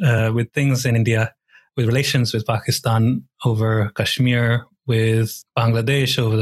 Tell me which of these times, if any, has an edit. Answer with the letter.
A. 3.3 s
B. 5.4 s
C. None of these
B